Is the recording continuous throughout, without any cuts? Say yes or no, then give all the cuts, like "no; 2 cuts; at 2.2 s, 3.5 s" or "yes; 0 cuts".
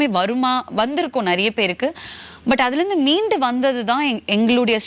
yes; 0 cuts